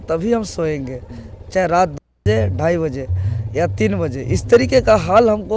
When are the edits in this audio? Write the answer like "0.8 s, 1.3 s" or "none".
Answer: none